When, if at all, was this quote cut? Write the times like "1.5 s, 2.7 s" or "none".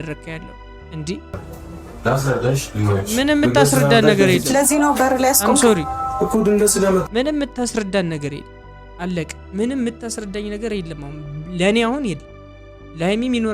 1.4 s

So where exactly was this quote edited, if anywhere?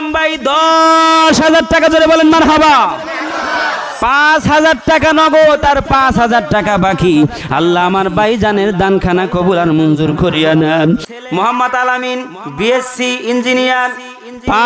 11.1 s

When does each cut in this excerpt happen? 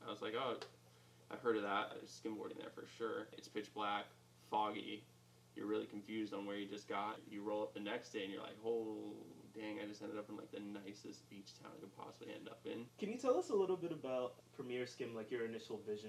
2.0 s, 3.4 s, 7.2 s, 12.9 s, 14.4 s

